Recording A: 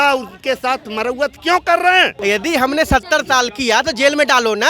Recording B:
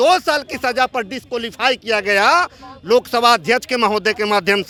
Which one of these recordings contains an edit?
A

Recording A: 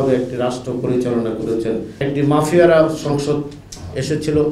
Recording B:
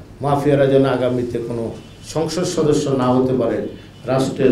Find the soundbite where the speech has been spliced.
A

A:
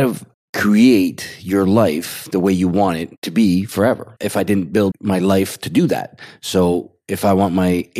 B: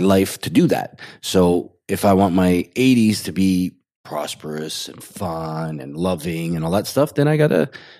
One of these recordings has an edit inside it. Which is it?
B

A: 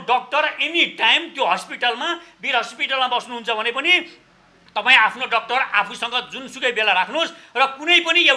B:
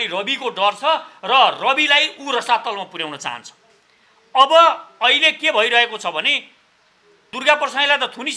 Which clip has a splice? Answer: B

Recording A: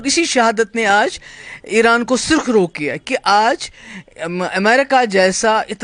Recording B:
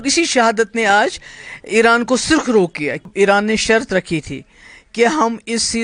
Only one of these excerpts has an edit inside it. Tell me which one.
B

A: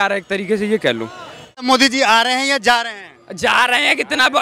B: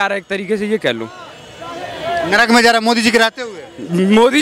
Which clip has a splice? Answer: A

